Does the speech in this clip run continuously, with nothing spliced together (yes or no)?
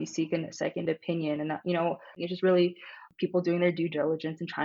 no